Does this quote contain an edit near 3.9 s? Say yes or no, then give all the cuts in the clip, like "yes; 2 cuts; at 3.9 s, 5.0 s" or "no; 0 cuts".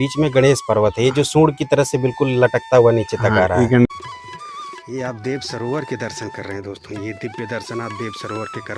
yes; 1 cut; at 3.9 s